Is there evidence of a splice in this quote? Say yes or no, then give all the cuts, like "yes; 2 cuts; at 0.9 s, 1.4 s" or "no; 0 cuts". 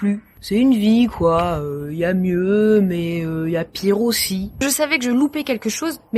yes; 1 cut; at 4.5 s